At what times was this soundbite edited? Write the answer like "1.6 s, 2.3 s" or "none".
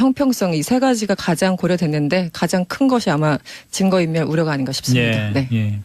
2.6 s